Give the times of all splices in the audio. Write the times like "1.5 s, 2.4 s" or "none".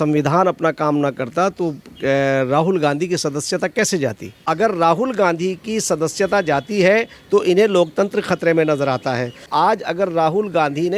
4.4 s, 9.5 s